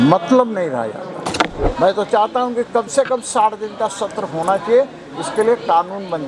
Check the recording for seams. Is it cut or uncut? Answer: cut